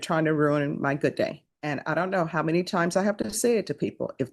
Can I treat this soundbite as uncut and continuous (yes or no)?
no